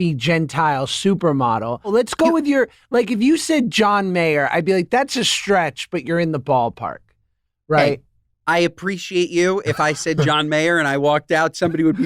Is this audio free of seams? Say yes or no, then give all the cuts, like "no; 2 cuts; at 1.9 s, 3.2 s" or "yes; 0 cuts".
no; 1 cut; at 1.9 s